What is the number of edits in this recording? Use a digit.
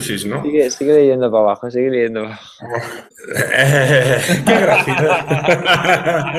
1